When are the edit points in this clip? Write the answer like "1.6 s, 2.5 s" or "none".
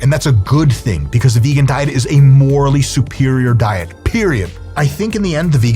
4.6 s